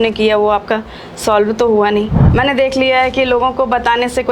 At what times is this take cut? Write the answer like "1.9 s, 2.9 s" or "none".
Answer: 2.2 s